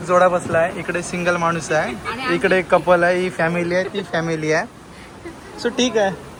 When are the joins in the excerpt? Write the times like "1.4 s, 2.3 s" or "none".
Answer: none